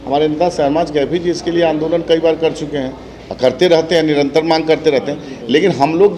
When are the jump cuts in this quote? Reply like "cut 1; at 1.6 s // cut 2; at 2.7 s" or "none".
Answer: none